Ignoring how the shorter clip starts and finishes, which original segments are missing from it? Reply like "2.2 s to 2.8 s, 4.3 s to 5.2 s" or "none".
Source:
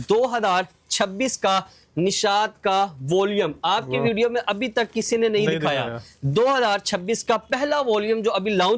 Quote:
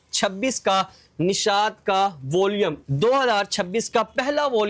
3.6 s to 6.1 s